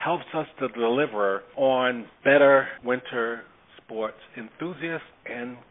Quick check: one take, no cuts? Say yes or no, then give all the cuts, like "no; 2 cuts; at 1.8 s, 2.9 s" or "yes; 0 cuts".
no; 3 cuts; at 1.5 s, 2.1 s, 2.7 s